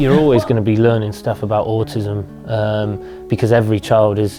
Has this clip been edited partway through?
no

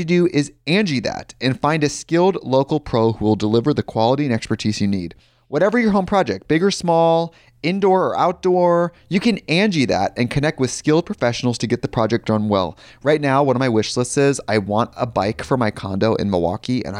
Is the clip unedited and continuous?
yes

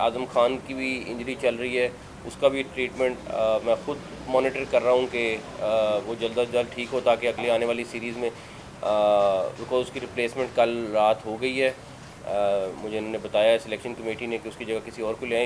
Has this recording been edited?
no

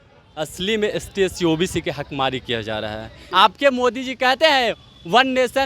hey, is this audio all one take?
no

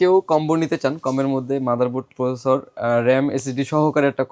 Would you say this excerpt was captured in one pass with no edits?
yes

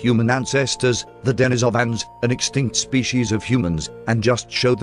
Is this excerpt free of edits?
no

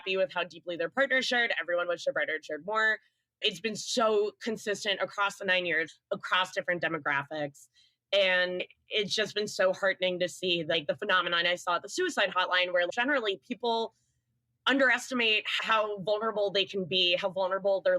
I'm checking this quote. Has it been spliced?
yes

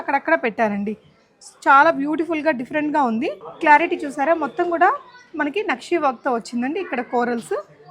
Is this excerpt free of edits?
no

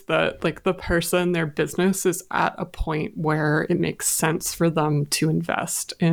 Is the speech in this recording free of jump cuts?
yes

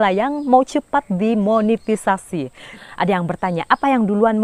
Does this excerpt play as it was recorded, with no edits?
no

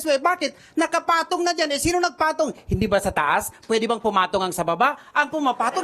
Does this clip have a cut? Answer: no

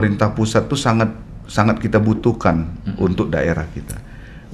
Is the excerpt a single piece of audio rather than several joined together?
yes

